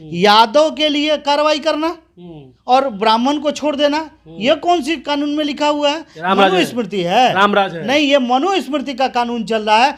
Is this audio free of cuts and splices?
yes; 0 cuts

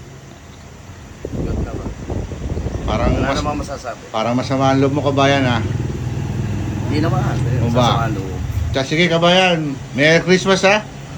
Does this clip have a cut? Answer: yes; 2 cuts; at 1.2 s, 8.6 s

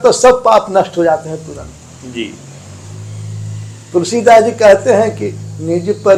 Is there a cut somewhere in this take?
no; 0 cuts

